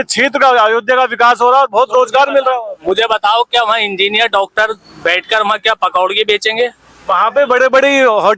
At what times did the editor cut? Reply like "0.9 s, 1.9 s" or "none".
none